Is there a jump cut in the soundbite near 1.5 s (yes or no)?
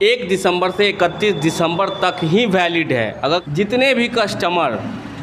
no